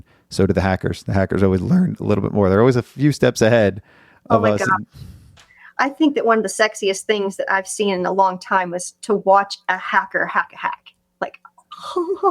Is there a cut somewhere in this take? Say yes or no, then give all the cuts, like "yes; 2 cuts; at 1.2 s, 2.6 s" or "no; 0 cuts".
no; 0 cuts